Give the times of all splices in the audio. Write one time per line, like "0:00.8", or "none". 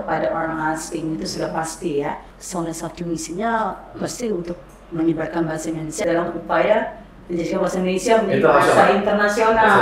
0:02.3
0:05.9